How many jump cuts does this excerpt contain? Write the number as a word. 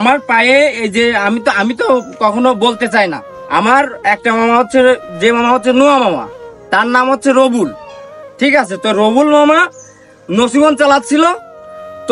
one